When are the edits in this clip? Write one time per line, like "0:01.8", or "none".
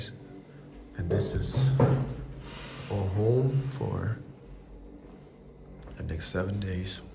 none